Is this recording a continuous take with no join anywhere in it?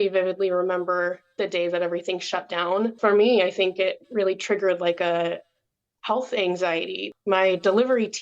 no; 2 cuts; at 3.0 s, 7.0 s

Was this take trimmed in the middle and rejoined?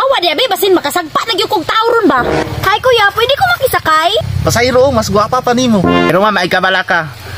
yes; 3 cuts; at 2.4 s, 4.2 s, 6.1 s

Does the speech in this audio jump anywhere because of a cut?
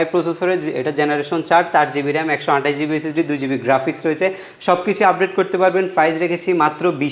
no; 0 cuts

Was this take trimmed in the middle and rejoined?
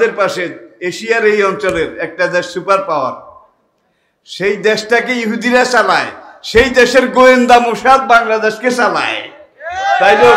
no; 0 cuts

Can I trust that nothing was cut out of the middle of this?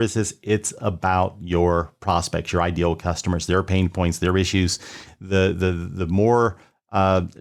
yes; 0 cuts

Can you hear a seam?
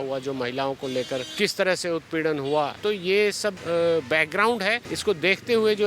yes; 3 cuts; at 1.3 s, 3.1 s, 4.9 s

